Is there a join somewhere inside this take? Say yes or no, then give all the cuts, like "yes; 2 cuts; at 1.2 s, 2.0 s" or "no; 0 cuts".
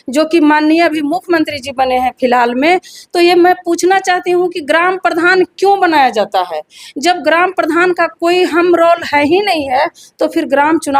no; 0 cuts